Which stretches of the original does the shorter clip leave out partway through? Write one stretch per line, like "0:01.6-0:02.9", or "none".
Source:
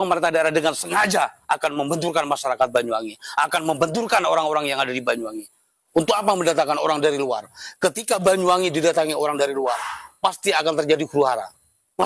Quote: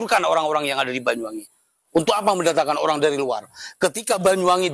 none